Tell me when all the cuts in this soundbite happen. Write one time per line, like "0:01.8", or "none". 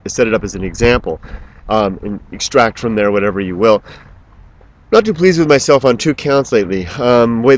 0:02.9